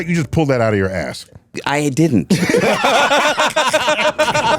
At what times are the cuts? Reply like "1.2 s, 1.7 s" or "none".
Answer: 1.6 s